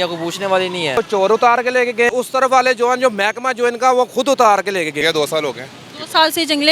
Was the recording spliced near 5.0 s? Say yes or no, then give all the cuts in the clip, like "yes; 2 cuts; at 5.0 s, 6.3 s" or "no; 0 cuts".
yes; 3 cuts; at 1.0 s, 2.1 s, 5.0 s